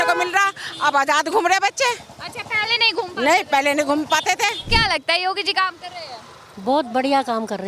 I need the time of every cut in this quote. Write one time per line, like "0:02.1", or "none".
0:04.7